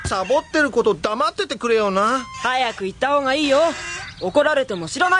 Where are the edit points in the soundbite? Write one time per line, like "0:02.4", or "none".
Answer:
0:01.0